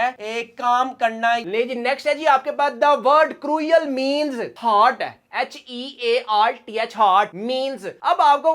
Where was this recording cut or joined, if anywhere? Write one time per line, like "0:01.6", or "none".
0:01.4
0:04.5